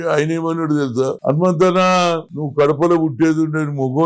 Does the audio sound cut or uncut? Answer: cut